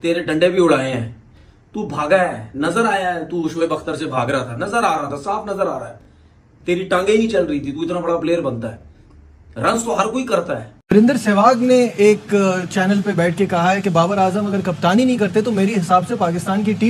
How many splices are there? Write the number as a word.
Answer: zero